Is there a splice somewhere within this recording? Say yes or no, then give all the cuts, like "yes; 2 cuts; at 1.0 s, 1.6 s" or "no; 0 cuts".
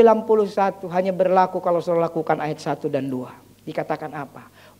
no; 0 cuts